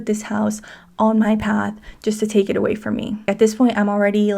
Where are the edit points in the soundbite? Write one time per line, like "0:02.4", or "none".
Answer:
0:03.2